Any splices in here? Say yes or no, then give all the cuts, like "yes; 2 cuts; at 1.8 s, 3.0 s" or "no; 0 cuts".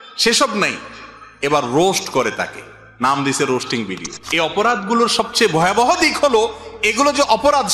yes; 1 cut; at 4.1 s